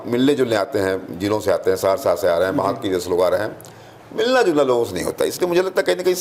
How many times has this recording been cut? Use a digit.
0